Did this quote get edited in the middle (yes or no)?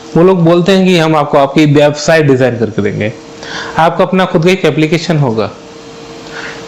no